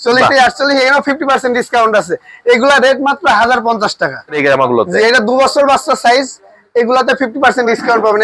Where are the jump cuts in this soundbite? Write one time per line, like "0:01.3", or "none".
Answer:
0:04.3